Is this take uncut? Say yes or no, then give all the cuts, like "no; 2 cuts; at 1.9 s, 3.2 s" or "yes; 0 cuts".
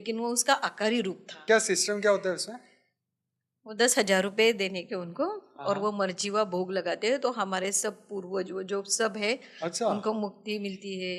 no; 1 cut; at 1.4 s